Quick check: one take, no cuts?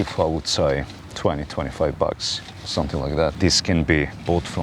no; 1 cut; at 3.4 s

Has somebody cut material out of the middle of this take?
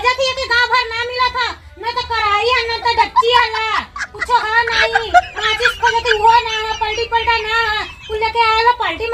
no; 0 cuts

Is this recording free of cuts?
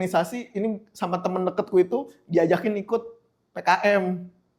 yes; 0 cuts

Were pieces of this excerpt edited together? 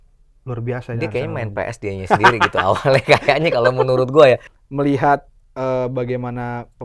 yes; 1 cut; at 4.5 s

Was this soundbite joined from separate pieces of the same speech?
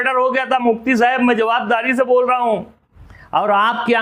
no; 0 cuts

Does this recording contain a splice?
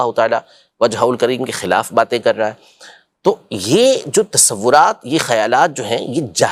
no; 0 cuts

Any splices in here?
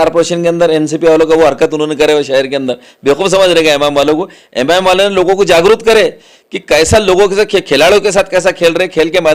no; 0 cuts

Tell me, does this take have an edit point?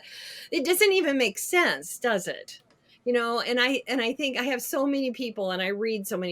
no; 0 cuts

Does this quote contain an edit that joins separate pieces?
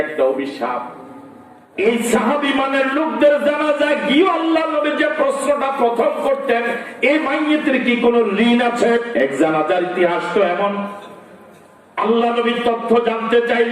yes; 2 cuts; at 1.6 s, 9.1 s

